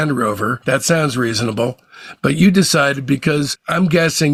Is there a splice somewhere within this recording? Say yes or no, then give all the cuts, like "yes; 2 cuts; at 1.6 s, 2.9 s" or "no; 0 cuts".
no; 0 cuts